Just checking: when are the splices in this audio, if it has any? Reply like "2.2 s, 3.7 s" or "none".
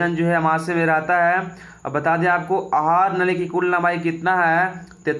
none